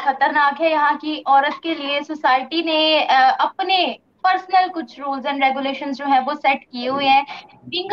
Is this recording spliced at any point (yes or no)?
no